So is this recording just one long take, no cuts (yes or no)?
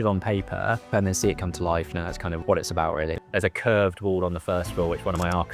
no